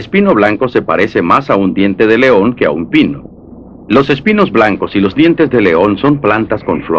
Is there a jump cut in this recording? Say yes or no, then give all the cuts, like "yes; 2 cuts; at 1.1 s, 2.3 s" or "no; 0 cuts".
yes; 1 cut; at 4.5 s